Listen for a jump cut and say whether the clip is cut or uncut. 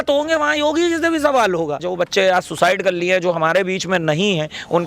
cut